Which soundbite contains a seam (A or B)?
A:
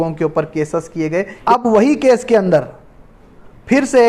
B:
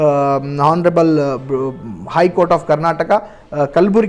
A